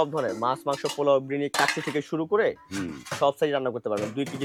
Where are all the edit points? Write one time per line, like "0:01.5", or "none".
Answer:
none